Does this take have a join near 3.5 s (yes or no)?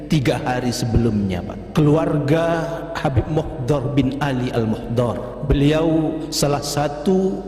no